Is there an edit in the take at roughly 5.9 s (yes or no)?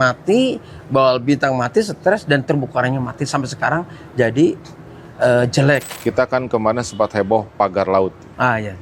yes